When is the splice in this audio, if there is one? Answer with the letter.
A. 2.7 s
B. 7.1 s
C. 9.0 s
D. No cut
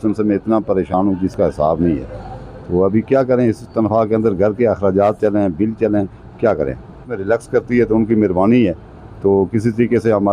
B